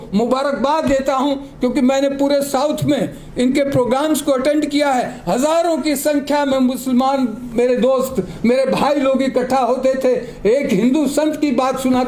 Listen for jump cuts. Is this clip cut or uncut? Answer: uncut